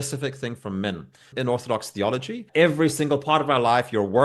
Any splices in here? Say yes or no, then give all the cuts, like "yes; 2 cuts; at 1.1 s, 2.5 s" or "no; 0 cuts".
yes; 2 cuts; at 1.3 s, 2.4 s